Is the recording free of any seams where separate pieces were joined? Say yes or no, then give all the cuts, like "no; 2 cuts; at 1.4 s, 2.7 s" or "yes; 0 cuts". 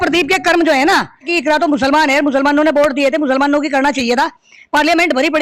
no; 1 cut; at 1.3 s